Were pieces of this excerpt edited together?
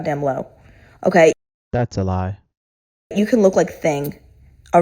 no; 0 cuts

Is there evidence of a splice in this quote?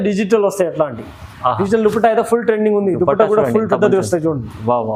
no; 0 cuts

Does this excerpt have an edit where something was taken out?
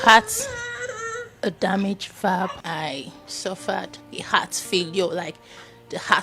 yes; 2 cuts; at 2.6 s, 4.0 s

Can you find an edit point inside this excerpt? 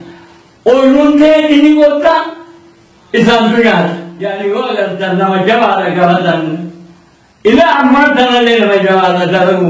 yes; 1 cut; at 4.1 s

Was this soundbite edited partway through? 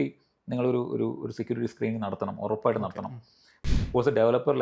yes; 1 cut; at 3.5 s

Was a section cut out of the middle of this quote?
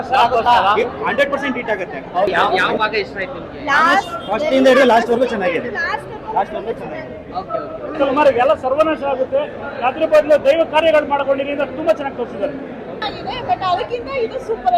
yes; 3 cuts; at 2.7 s, 8.0 s, 13.1 s

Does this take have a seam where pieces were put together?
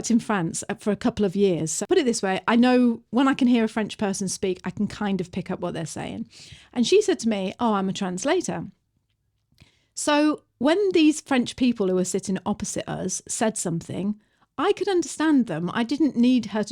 yes; 1 cut; at 1.7 s

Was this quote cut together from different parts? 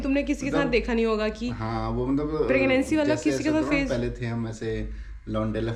no; 0 cuts

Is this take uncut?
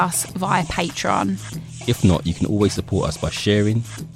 yes; 0 cuts

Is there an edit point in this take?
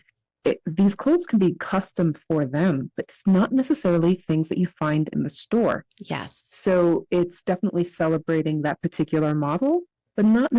no; 0 cuts

